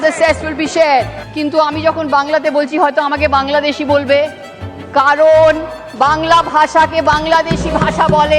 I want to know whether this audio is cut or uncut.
cut